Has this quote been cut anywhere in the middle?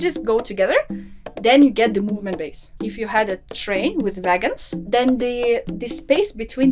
yes; 2 cuts; at 2.8 s, 4.7 s

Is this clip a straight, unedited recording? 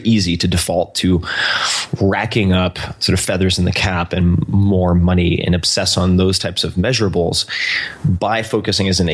yes; 0 cuts

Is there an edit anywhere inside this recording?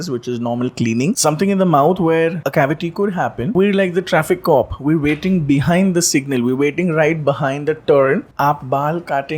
yes; 4 cuts; at 1.2 s, 2.4 s, 3.5 s, 8.3 s

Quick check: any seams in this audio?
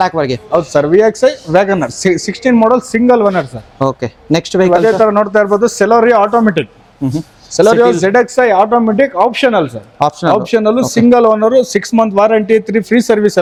no; 0 cuts

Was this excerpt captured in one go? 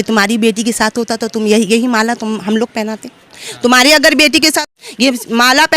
yes; 0 cuts

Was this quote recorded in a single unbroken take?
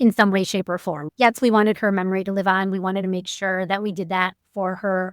no; 1 cut; at 1.0 s

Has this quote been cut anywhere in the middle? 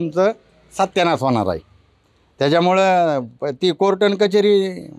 no; 0 cuts

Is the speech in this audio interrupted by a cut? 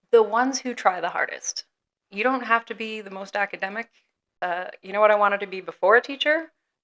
yes; 1 cut; at 4.3 s

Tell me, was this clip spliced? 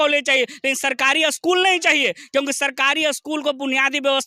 no; 0 cuts

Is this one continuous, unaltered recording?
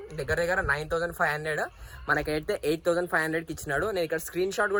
yes; 0 cuts

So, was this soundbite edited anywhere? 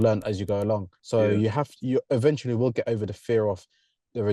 yes; 1 cut; at 0.9 s

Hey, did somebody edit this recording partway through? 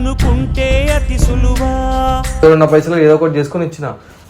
yes; 1 cut; at 2.4 s

